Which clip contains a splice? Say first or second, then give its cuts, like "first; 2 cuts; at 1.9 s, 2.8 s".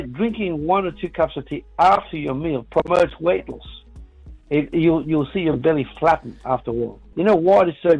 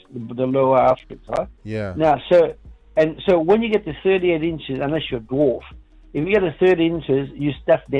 first; 1 cut; at 7.0 s